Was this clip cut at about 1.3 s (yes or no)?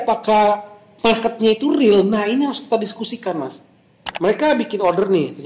no